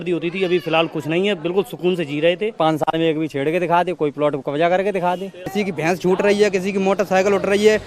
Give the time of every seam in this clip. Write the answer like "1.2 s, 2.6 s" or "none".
2.5 s, 5.4 s